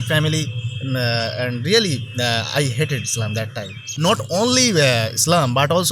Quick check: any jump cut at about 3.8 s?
yes; 1 cut; at 3.8 s

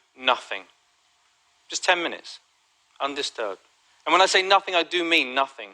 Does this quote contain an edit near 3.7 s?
yes; 1 cut; at 3.7 s

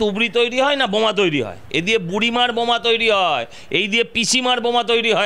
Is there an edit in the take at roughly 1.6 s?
yes; 1 cut; at 1.6 s

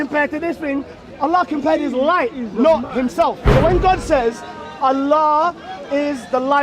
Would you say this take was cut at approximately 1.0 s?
no; 1 cut; at 3.4 s

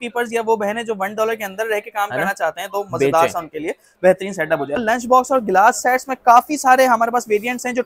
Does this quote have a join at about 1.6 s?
no; 1 cut; at 4.8 s

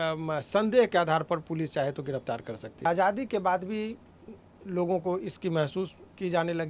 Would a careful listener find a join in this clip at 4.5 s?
no; 1 cut; at 2.8 s

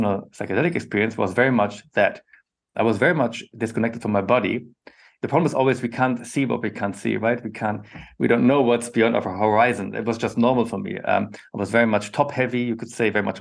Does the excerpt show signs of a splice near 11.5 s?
no; 1 cut; at 5.1 s

